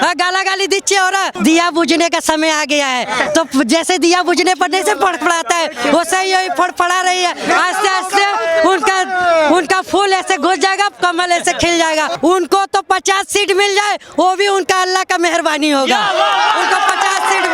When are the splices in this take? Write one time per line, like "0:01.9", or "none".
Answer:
0:01.3
0:12.1